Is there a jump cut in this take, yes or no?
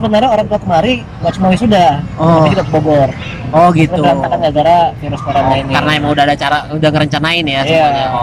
no